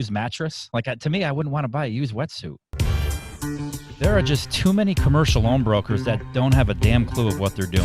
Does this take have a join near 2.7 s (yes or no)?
yes